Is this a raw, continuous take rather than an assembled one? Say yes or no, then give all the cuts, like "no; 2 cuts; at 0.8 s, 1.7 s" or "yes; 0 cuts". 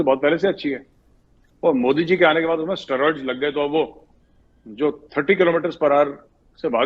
yes; 0 cuts